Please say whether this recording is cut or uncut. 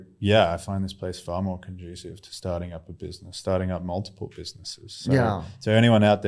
uncut